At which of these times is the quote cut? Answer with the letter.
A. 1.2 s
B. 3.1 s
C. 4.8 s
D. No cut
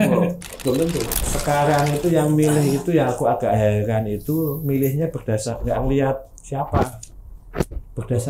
A